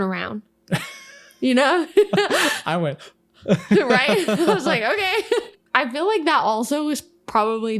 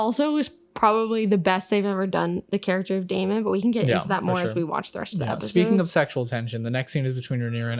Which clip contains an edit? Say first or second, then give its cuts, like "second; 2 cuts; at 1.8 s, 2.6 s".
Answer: first; 1 cut; at 5.5 s